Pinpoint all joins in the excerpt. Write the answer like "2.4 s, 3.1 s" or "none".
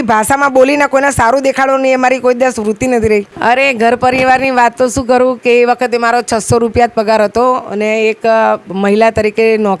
3.4 s